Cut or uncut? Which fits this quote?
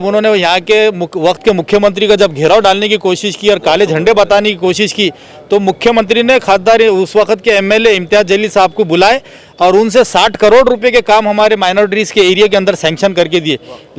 uncut